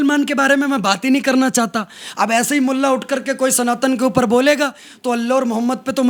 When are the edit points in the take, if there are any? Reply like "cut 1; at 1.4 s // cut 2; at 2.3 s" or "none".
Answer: none

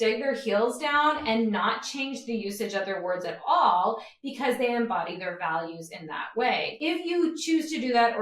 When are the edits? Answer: cut 1; at 6.7 s

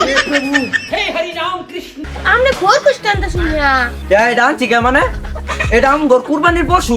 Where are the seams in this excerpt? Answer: cut 1; at 2.0 s

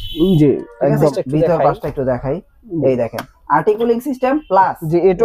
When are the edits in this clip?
cut 1; at 1.2 s

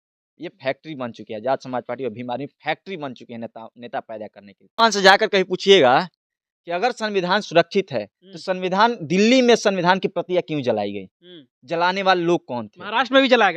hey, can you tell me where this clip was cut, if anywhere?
cut 1; at 4.7 s

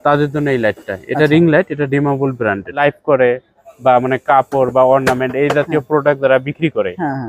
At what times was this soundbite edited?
cut 1; at 2.8 s

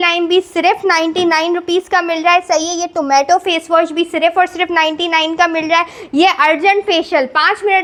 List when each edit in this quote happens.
none

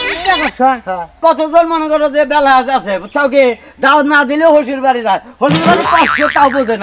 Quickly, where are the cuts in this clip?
cut 1; at 1.2 s

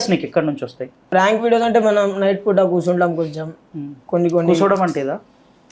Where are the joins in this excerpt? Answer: cut 1; at 1.0 s

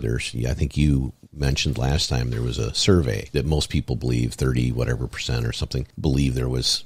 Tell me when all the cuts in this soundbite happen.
cut 1; at 3.2 s // cut 2; at 5.9 s

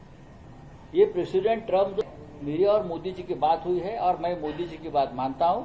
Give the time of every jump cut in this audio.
cut 1; at 2.0 s

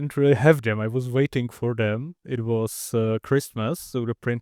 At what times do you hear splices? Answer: none

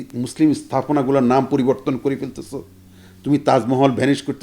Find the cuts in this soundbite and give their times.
none

